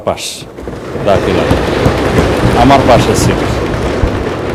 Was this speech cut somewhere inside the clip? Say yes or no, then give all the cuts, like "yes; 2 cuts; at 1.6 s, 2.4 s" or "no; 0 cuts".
no; 0 cuts